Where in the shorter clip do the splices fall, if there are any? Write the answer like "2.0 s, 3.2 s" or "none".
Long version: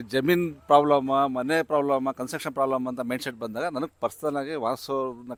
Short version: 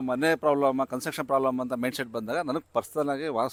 none

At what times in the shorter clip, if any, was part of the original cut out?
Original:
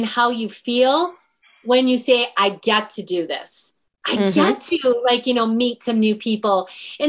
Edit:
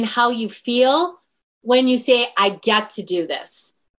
none

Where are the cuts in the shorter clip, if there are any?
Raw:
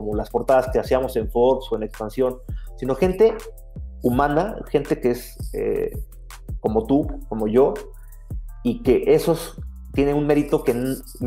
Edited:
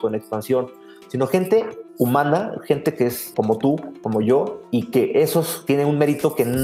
1.8 s, 3.2 s, 4.6 s, 5.6 s

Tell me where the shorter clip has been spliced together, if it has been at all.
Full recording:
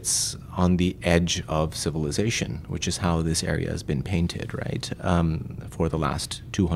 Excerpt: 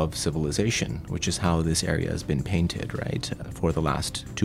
3.3 s

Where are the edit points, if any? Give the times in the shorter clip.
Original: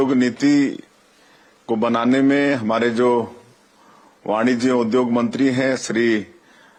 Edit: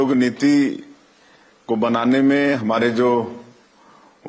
none

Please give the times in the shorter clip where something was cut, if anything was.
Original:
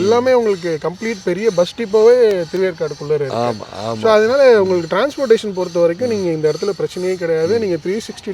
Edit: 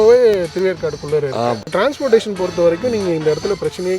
1.7 s

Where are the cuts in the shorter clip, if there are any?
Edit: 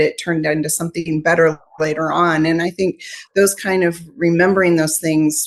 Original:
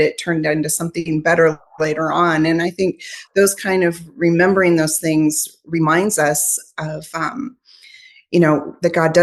none

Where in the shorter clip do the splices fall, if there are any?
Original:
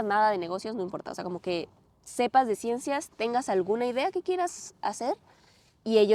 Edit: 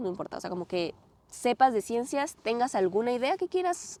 none

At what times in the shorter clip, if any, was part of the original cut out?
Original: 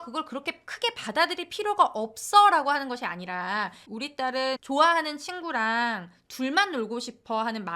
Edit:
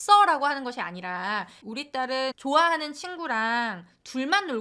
none

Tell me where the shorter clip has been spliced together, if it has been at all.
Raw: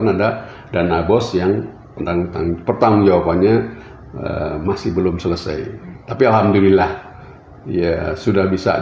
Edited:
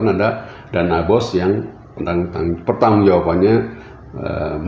none

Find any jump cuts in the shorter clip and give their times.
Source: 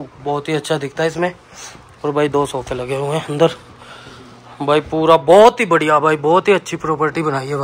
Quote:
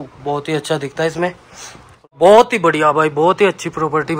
2.1 s

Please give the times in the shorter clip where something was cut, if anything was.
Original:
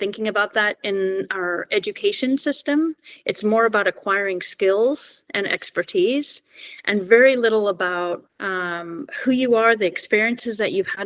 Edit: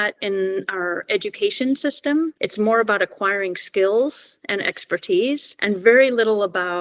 2.4 s, 5.5 s

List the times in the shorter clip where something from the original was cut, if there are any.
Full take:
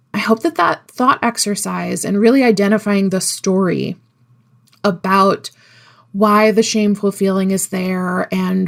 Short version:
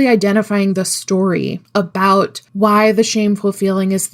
1.6 s, 2.4 s

